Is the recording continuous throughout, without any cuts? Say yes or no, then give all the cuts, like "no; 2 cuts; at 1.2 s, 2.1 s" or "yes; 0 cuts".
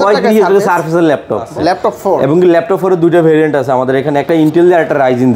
no; 1 cut; at 1.5 s